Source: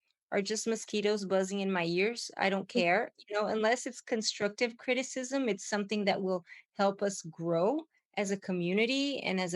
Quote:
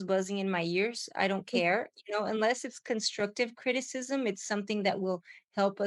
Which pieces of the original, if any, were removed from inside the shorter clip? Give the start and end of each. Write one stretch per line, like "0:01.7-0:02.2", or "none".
none